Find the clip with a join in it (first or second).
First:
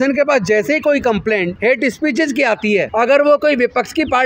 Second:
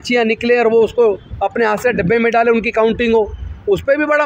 first